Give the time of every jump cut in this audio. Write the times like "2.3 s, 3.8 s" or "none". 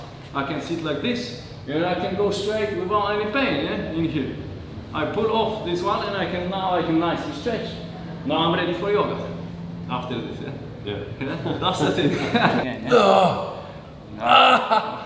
12.7 s